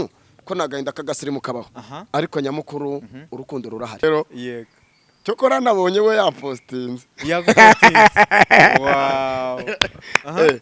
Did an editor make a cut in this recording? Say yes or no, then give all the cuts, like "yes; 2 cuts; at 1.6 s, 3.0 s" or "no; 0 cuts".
yes; 1 cut; at 4.0 s